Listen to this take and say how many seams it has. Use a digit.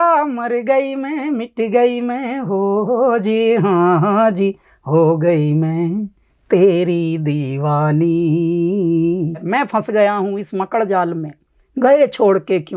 1